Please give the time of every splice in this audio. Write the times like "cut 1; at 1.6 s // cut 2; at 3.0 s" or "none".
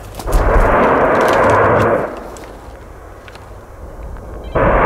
cut 1; at 3.8 s